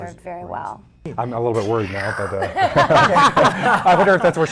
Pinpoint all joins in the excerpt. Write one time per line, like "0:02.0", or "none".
0:01.1